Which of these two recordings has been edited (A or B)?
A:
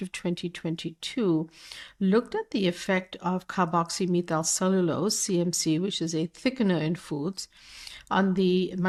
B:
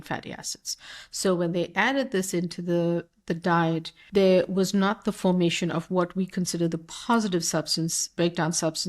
B